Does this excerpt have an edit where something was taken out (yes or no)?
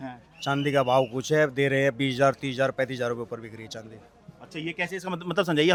no